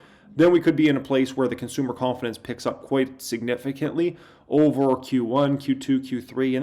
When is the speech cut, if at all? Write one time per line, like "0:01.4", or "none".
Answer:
none